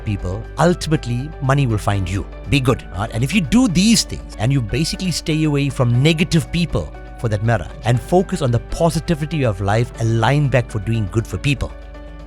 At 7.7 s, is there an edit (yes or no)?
yes